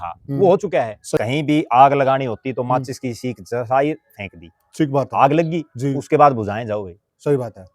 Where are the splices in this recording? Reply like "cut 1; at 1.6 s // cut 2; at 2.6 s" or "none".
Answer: cut 1; at 1.2 s